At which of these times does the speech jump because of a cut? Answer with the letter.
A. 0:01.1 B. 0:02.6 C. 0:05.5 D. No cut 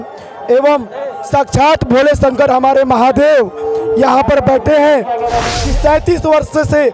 C